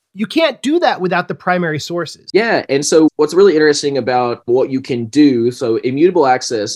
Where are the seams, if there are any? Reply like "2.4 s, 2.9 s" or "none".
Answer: 2.2 s